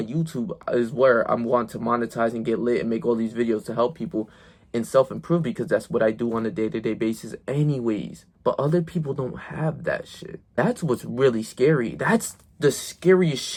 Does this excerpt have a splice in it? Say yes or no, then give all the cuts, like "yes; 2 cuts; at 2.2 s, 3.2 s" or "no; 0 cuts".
no; 0 cuts